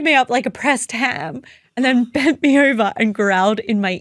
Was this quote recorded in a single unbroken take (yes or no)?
yes